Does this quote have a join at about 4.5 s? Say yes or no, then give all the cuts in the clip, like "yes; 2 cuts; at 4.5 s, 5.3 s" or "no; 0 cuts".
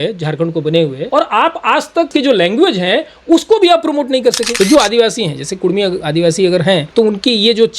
yes; 4 cuts; at 1.0 s, 2.1 s, 4.5 s, 6.9 s